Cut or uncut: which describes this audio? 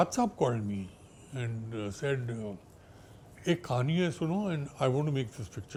uncut